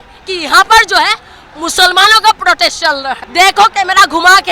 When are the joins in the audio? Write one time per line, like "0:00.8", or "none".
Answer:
0:03.2